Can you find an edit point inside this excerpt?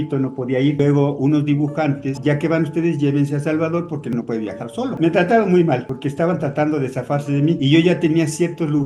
yes; 2 cuts; at 2.1 s, 5.0 s

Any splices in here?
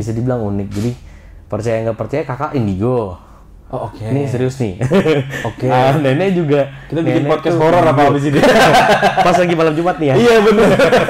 no; 0 cuts

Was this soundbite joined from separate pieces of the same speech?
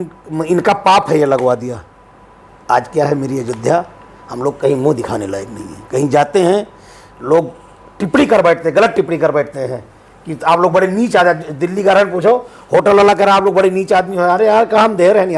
no; 0 cuts

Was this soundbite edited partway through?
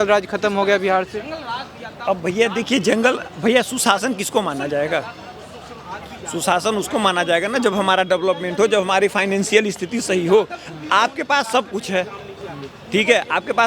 no; 0 cuts

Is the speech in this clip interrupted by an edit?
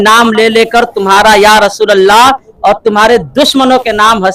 no; 0 cuts

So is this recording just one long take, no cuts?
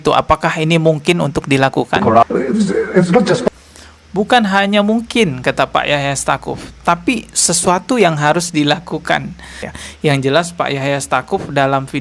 no; 2 cuts; at 2.2 s, 9.8 s

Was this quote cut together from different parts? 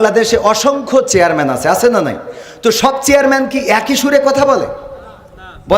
no; 0 cuts

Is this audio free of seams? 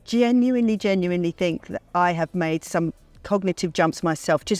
yes; 0 cuts

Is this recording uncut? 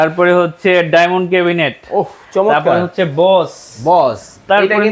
yes; 0 cuts

